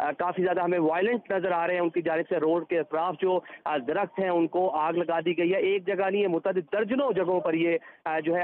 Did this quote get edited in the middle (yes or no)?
no